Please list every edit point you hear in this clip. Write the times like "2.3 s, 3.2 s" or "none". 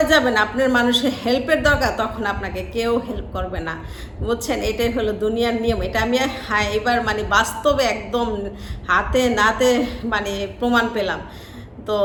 none